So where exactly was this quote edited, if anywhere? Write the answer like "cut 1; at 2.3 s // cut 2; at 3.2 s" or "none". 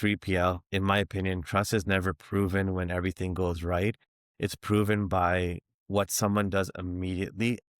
cut 1; at 5.6 s